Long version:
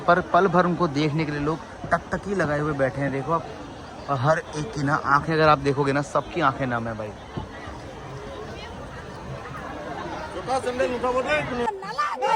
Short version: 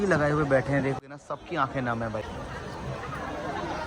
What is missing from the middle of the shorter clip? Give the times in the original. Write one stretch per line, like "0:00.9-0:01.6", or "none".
0:03.3-0:05.8
0:07.1-0:08.7

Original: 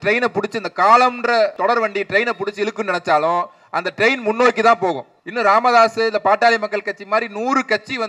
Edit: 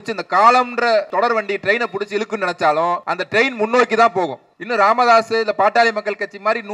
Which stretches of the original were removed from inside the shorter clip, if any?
0:03.6-0:03.8

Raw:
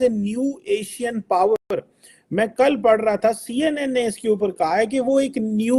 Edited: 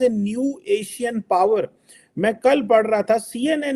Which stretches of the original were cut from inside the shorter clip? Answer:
0:01.6-0:01.7

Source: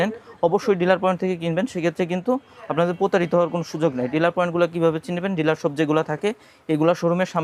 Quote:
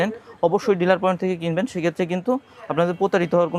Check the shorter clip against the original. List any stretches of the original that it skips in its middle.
none

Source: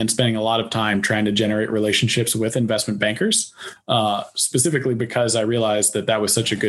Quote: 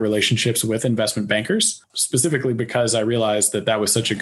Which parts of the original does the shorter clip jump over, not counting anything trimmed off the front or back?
0:03.6-0:04.3

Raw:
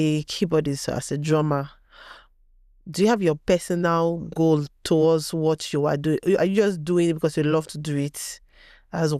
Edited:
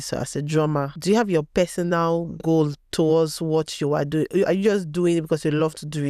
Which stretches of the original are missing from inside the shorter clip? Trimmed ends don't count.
0:01.7-0:02.9

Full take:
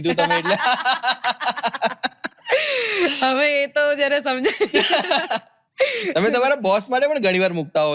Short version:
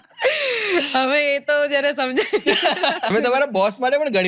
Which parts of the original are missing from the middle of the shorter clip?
0:05.4-0:06.2

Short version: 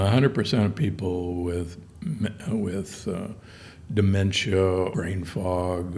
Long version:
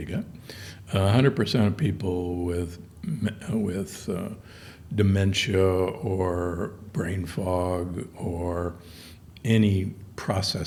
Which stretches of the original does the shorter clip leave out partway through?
0:05.9-0:06.9

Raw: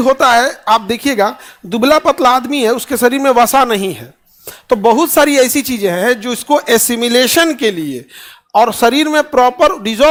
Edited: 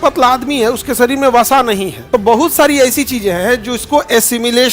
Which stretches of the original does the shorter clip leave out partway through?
0:04.0-0:04.5

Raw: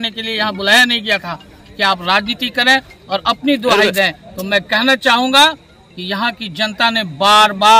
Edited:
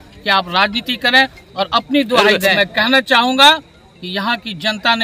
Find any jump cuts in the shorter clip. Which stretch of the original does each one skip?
0:04.1-0:04.5

